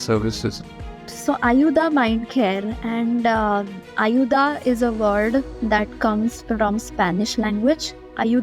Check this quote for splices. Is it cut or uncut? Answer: uncut